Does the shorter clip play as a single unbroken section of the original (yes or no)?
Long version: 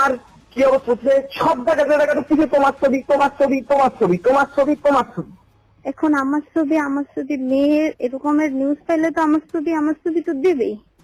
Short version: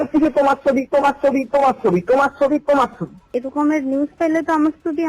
no